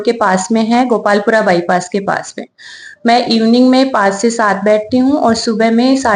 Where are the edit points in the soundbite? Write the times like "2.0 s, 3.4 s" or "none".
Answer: none